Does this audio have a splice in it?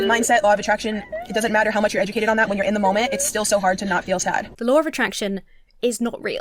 yes; 1 cut; at 4.5 s

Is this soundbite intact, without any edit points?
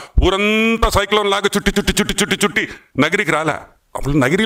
yes; 0 cuts

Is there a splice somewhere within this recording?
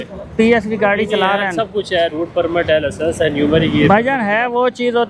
no; 0 cuts

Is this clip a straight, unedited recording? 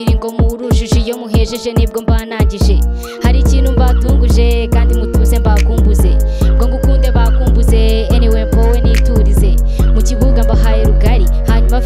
yes; 0 cuts

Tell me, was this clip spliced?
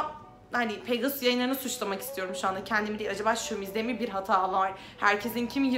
no; 0 cuts

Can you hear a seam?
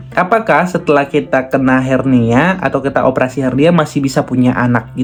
no; 0 cuts

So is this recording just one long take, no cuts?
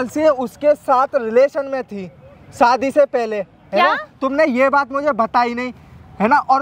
yes; 0 cuts

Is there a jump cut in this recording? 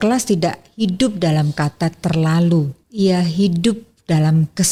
no; 0 cuts

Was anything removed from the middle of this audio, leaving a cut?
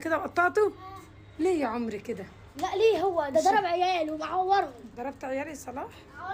no; 0 cuts

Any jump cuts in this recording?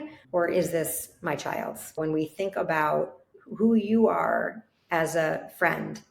yes; 1 cut; at 2.0 s

